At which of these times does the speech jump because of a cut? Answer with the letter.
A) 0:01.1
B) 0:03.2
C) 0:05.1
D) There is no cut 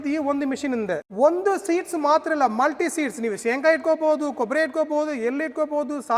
A